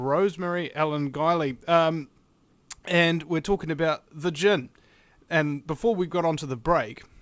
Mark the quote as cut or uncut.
uncut